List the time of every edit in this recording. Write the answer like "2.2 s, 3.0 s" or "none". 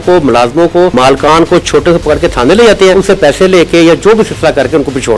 0.9 s, 2.9 s

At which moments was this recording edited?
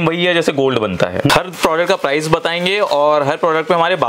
1.3 s

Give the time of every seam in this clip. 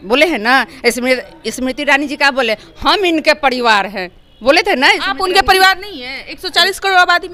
none

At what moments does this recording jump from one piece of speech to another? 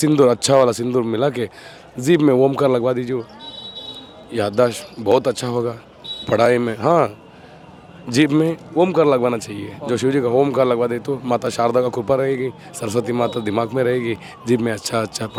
none

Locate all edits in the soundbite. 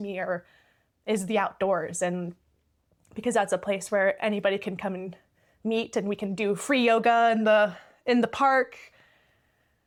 none

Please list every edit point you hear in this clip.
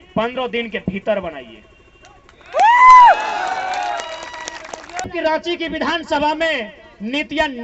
5.1 s

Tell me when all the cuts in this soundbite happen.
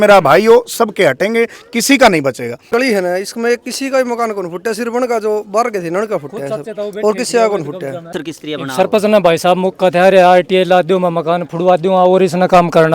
2.6 s, 8.1 s

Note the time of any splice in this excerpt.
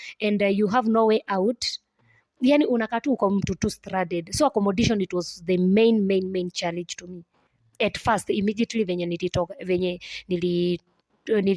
none

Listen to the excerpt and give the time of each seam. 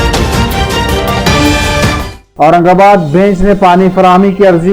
2.2 s

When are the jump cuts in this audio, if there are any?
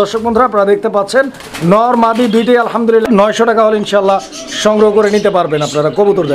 3.0 s

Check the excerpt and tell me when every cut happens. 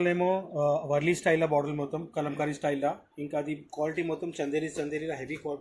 none

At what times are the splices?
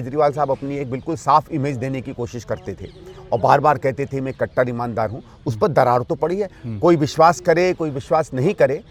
none

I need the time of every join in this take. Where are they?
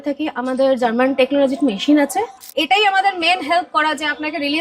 2.5 s

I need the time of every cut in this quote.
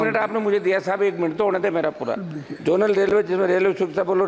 none

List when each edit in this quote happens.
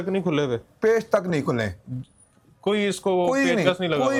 none

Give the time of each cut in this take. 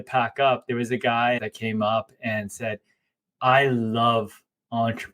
1.4 s

